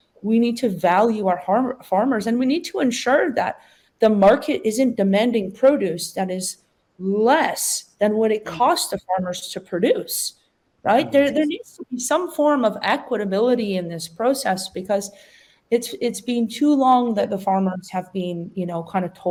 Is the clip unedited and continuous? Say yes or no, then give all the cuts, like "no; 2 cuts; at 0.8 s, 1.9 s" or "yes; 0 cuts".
yes; 0 cuts